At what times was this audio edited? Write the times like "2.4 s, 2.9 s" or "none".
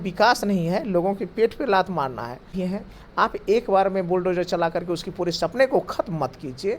2.5 s